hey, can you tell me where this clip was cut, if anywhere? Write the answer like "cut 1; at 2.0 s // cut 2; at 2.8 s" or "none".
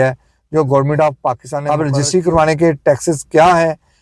cut 1; at 1.5 s

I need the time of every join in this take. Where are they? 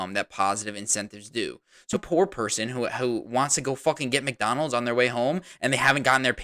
cut 1; at 2.0 s

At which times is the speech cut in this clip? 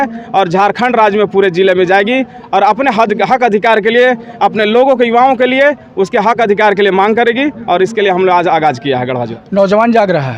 cut 1; at 9.3 s

